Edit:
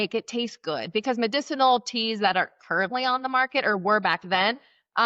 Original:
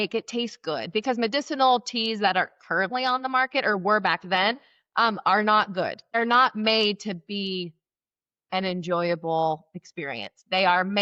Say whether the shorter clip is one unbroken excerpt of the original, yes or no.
yes